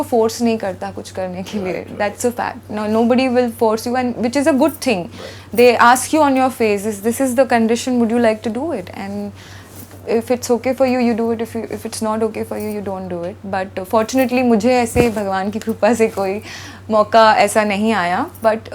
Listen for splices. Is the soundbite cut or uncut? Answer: uncut